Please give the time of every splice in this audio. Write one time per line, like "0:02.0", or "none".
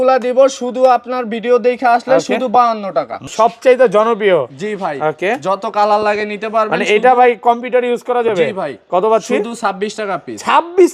0:03.3